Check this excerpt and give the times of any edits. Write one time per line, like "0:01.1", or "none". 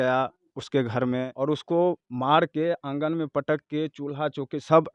0:01.3